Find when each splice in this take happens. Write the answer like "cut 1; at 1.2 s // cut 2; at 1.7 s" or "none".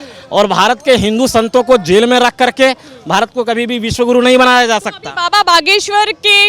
none

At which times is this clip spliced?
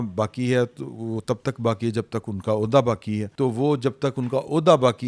none

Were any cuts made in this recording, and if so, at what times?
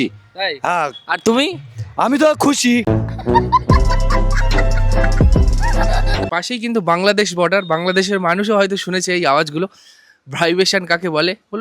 cut 1; at 6.3 s

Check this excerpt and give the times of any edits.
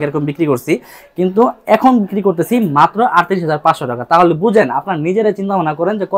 none

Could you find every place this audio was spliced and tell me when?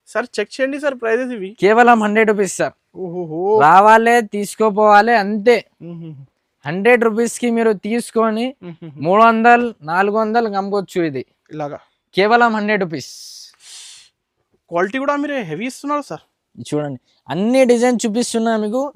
none

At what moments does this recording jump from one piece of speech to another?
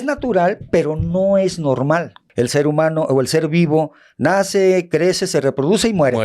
cut 1; at 2.2 s

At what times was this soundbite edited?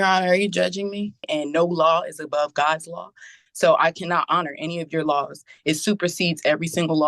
cut 1; at 1.2 s

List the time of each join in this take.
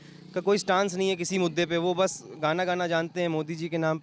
none

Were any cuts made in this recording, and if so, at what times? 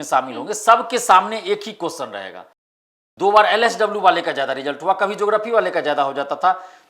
cut 1; at 2.7 s

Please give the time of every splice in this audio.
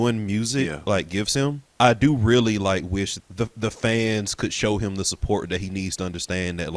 cut 1; at 1.7 s // cut 2; at 3.1 s

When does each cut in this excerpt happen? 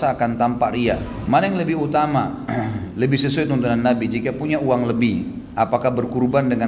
cut 1; at 1.1 s

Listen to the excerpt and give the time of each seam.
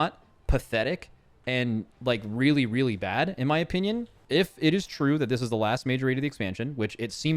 cut 1; at 4.2 s

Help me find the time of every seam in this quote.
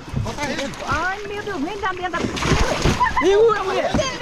none

